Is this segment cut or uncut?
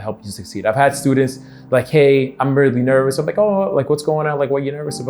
uncut